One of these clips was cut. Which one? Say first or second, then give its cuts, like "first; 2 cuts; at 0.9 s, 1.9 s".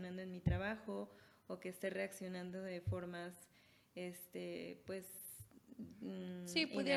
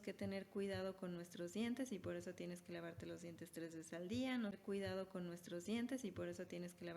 second; 1 cut; at 4.6 s